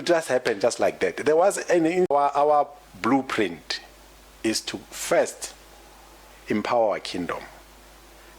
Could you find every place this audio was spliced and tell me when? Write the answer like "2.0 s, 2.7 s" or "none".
2.1 s